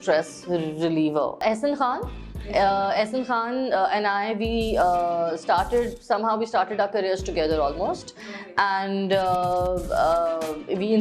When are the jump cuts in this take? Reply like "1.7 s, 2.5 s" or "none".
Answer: 1.4 s